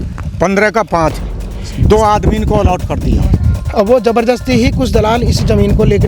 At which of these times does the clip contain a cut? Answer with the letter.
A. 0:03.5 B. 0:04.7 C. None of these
A